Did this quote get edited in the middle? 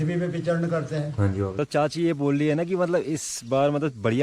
yes; 1 cut; at 1.6 s

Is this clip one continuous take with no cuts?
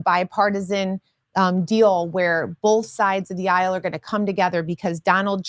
yes; 0 cuts

